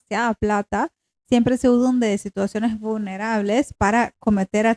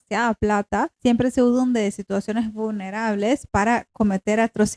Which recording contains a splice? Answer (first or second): second